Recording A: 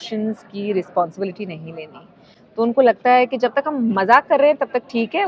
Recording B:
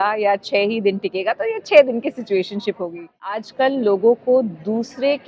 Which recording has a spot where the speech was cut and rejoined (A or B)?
B